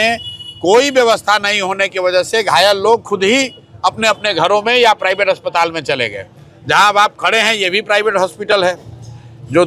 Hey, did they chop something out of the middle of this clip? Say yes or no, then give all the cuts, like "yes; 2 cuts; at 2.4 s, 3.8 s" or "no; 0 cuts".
no; 0 cuts